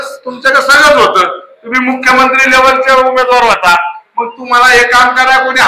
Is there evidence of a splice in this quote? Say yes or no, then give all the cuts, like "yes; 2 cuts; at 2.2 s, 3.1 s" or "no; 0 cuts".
no; 0 cuts